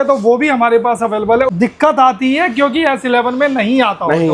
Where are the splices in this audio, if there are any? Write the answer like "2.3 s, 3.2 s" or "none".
1.5 s

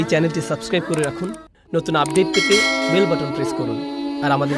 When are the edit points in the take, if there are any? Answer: none

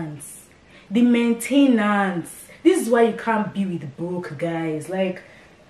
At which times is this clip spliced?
none

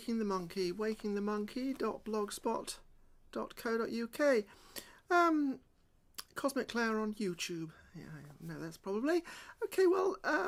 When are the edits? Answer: none

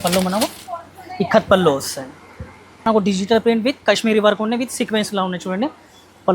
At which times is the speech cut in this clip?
2.9 s

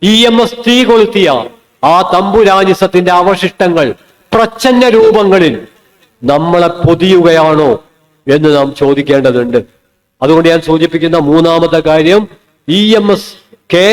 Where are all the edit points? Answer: none

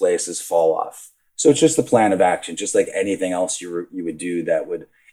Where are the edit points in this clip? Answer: 0.9 s

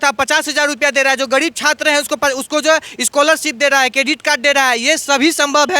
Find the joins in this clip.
none

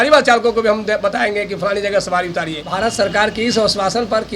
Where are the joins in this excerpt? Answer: 2.6 s

